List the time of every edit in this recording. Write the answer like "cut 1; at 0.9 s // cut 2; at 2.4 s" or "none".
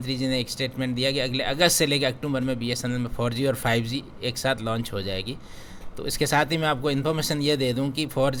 none